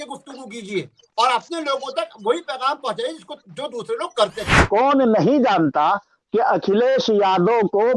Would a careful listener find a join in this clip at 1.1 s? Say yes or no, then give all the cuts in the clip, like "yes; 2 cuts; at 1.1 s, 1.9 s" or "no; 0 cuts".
no; 1 cut; at 4.4 s